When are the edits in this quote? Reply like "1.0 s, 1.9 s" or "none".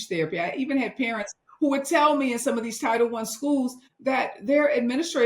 3.9 s